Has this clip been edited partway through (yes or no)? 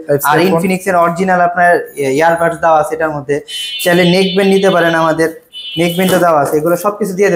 no